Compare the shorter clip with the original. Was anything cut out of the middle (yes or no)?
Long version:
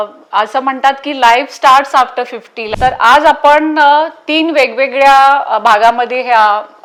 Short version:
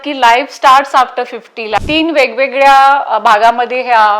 yes